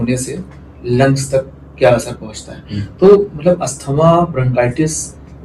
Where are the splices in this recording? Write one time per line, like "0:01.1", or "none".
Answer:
none